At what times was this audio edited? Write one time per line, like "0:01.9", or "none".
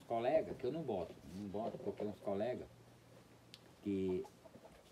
none